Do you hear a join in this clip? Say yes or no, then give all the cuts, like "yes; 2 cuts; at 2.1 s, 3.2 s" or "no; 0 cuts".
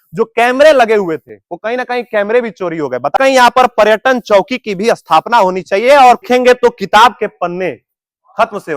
yes; 2 cuts; at 3.1 s, 6.2 s